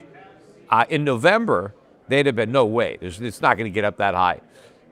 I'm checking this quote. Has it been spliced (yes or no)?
no